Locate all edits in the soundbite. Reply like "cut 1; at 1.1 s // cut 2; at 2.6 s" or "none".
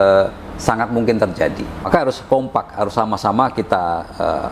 cut 1; at 1.9 s